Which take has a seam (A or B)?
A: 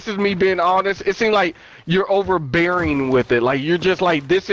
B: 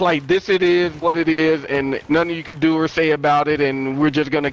B